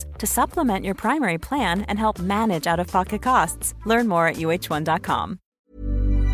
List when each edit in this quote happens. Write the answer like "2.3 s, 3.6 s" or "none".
5.4 s